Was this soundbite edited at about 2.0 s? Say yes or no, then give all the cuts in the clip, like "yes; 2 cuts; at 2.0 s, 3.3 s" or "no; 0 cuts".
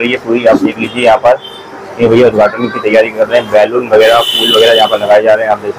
no; 0 cuts